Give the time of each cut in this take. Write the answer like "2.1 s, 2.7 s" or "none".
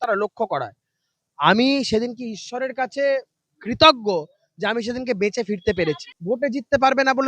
6.1 s